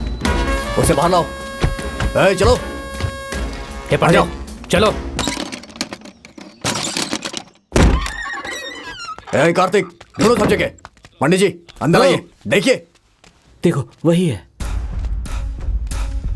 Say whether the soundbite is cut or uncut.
uncut